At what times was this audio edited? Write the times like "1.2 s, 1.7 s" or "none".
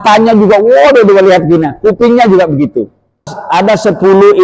3.3 s